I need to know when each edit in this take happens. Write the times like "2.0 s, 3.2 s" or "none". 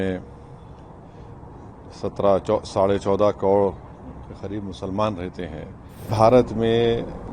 6.1 s